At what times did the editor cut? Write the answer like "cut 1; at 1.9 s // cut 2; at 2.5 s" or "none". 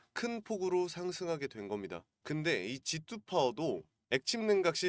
cut 1; at 2.1 s // cut 2; at 3.9 s